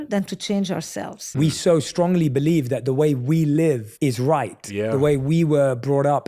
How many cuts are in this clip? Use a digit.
1